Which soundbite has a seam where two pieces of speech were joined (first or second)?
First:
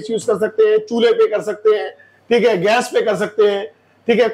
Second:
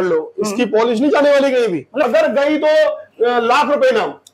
second